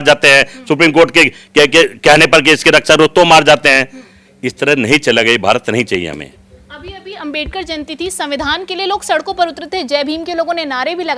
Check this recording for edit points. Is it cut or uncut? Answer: uncut